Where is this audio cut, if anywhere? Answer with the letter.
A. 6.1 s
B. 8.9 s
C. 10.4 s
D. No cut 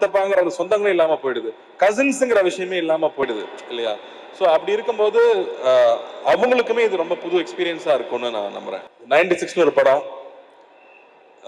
B